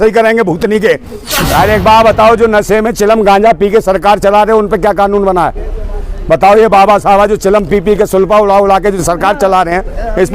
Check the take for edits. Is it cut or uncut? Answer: cut